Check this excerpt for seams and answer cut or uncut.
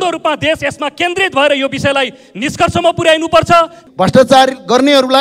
cut